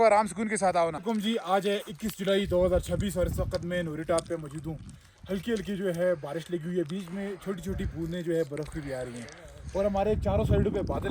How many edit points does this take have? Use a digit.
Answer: 1